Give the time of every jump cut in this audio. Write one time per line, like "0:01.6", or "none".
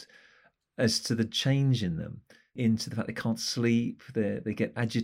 0:02.5

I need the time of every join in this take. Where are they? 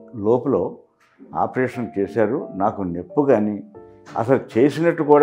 none

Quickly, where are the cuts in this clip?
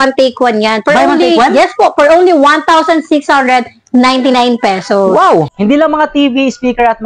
0:05.5

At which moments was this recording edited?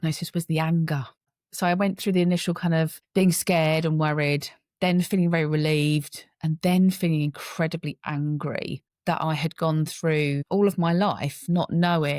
0:01.3

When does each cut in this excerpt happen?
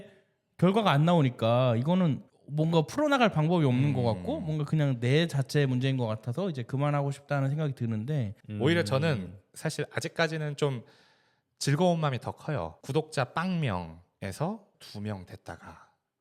0:08.4
0:12.8

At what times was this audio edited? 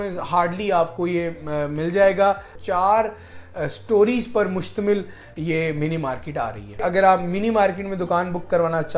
0:02.5
0:06.8

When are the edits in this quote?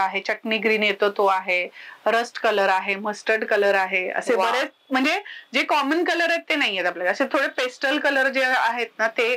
none

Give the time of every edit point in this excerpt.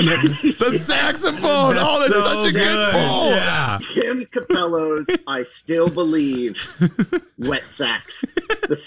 0:03.7

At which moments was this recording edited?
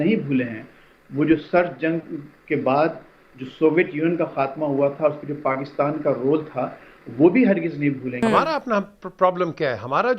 0:08.2

